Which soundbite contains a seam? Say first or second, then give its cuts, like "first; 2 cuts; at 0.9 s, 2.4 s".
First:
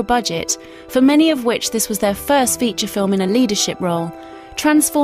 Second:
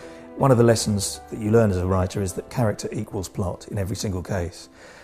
first; 1 cut; at 1.6 s